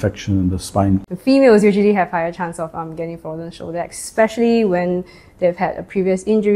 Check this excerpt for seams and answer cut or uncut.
cut